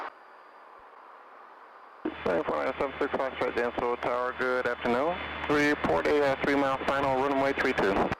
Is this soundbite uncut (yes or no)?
no